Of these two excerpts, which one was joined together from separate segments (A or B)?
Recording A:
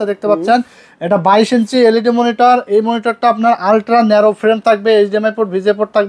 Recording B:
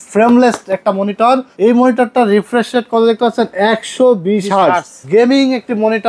B